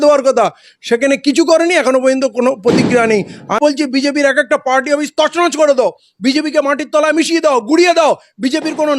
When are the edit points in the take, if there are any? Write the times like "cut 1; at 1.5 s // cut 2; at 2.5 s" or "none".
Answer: cut 1; at 3.5 s